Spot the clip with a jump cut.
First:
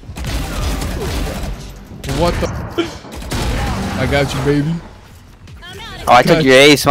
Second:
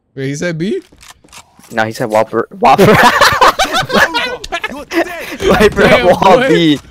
first; 1 cut; at 2.4 s

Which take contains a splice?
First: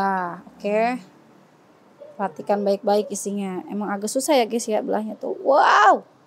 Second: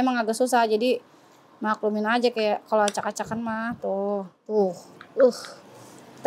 second; 1 cut; at 4.4 s

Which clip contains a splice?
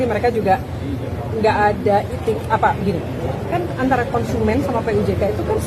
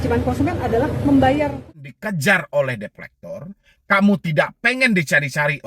second; 1 cut; at 1.8 s

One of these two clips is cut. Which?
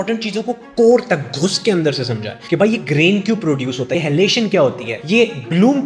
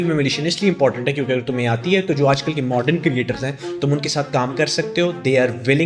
first; 3 cuts; at 2.3 s, 3.9 s, 4.9 s

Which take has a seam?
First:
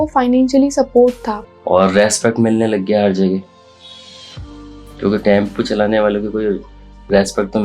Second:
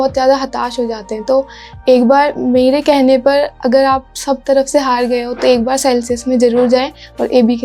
first; 1 cut; at 1.3 s

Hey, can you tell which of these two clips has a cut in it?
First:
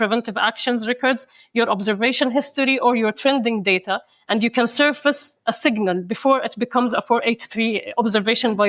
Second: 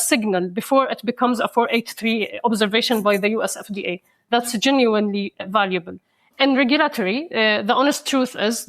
second; 1 cut; at 5.4 s

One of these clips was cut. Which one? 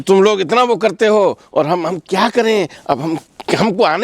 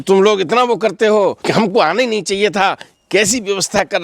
second; 1 cut; at 1.4 s

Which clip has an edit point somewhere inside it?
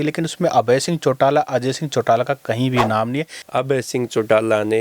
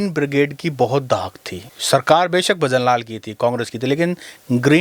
first; 1 cut; at 3.4 s

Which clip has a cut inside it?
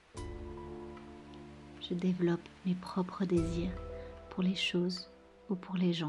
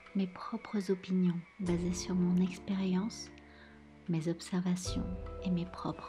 first; 1 cut; at 1.8 s

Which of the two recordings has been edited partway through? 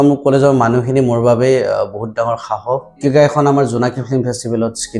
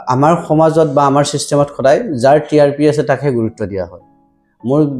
first; 1 cut; at 3.0 s

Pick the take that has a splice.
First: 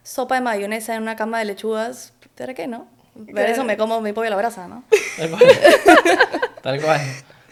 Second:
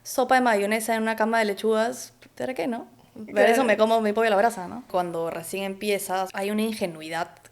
second; 2 cuts; at 4.8 s, 6.3 s

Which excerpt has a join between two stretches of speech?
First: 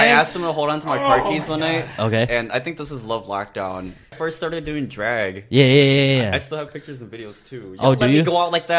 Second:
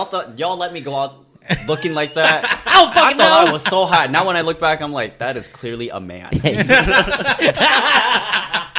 first; 1 cut; at 4.1 s

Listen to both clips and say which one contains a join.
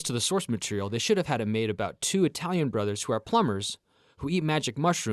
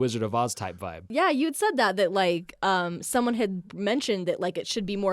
second; 1 cut; at 1.0 s

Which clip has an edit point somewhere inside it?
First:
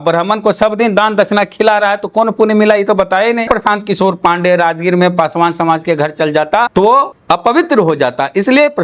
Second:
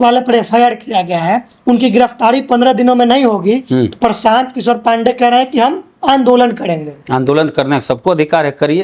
first; 2 cuts; at 3.4 s, 6.8 s

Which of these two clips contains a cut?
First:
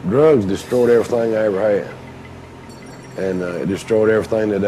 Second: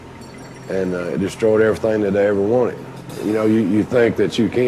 second; 1 cut; at 3.2 s

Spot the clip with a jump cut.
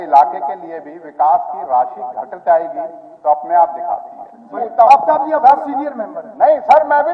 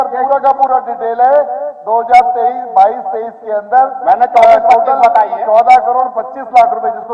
first; 1 cut; at 4.6 s

